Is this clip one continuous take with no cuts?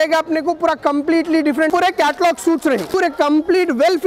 no; 2 cuts; at 1.7 s, 2.9 s

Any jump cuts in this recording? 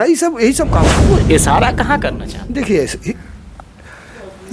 yes; 1 cut; at 0.9 s

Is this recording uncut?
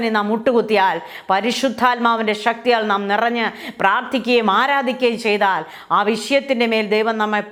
yes; 0 cuts

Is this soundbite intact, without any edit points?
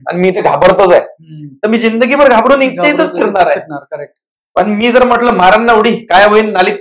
yes; 0 cuts

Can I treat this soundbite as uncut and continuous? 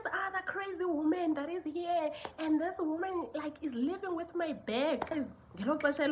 no; 1 cut; at 5.1 s

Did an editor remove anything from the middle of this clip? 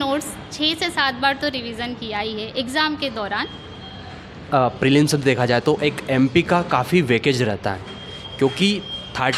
no; 0 cuts

